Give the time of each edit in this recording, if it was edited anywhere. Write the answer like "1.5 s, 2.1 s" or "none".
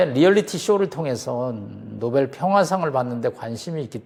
none